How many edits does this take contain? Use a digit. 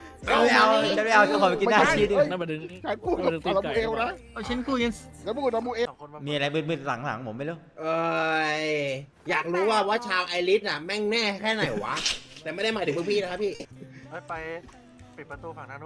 1